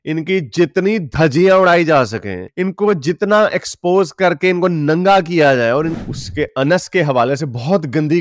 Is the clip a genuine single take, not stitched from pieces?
no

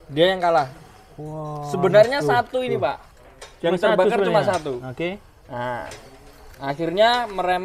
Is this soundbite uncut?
yes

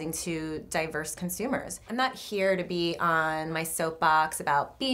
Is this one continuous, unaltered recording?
no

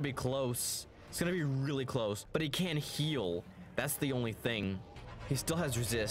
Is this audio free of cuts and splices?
no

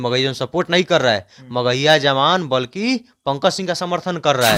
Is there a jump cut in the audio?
no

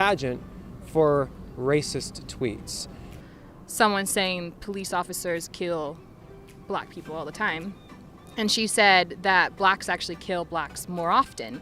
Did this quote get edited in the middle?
yes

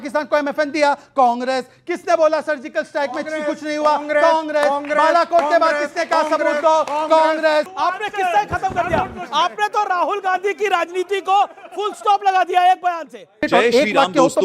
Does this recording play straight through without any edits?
no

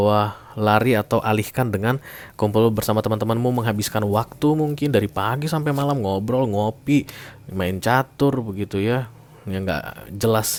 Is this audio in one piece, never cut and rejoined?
yes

